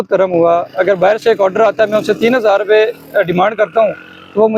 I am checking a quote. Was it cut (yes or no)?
no